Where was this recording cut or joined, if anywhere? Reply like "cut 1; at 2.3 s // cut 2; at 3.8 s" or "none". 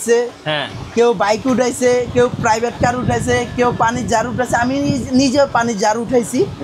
none